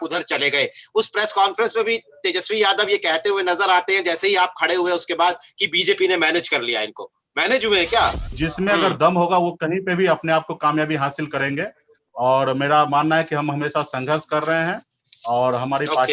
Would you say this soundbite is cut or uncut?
cut